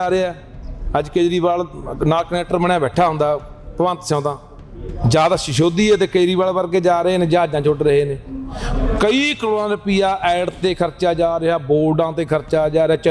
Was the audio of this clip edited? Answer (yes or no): no